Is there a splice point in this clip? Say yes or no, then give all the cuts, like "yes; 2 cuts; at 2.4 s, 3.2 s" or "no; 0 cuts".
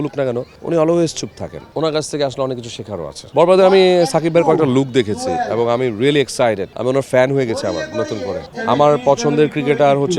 yes; 3 cuts; at 3.2 s, 6.7 s, 8.4 s